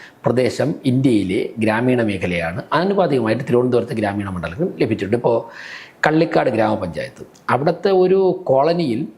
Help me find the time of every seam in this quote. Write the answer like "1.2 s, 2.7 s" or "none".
none